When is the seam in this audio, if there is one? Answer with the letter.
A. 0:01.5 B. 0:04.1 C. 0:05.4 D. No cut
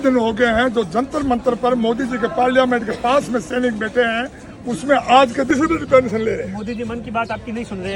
C